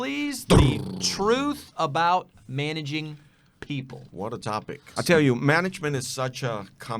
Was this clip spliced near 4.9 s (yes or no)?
yes